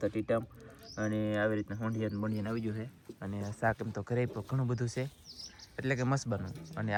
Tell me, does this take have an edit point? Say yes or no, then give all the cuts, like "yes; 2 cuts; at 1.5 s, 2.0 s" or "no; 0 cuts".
no; 0 cuts